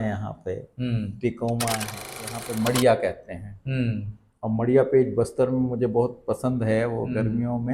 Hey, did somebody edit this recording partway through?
yes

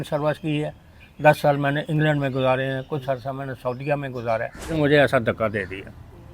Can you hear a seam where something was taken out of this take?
yes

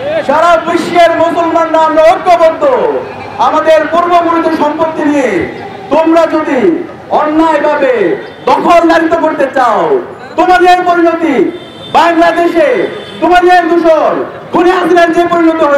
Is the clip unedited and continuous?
yes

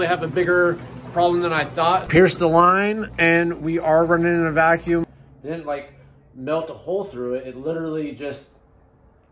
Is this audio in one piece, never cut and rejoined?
no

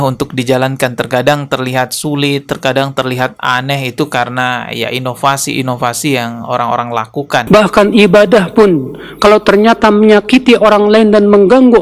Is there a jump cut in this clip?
yes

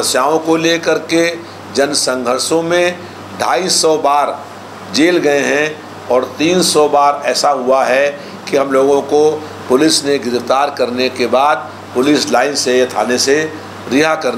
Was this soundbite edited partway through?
no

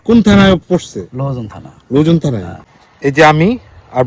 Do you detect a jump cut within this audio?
yes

